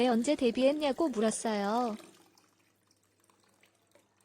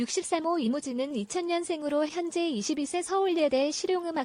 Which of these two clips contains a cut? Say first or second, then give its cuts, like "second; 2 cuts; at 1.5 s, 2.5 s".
first; 1 cut; at 2.0 s